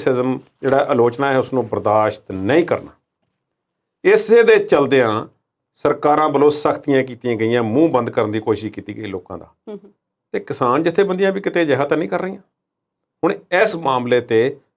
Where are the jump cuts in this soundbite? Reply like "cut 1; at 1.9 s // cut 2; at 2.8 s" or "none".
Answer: none